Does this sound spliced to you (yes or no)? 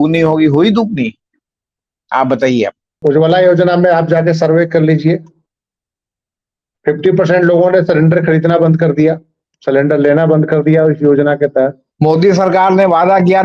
yes